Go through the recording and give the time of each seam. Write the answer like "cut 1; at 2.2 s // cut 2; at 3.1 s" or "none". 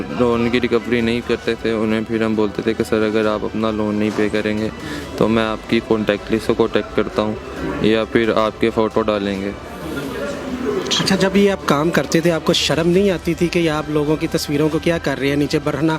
none